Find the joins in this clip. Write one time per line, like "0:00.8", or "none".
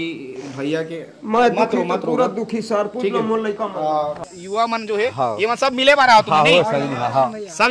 0:04.2